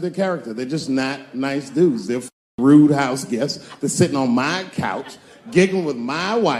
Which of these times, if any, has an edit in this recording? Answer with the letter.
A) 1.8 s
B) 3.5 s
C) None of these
C